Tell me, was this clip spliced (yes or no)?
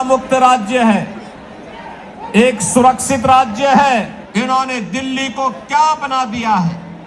yes